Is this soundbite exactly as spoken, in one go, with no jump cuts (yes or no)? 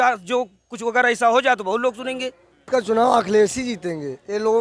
no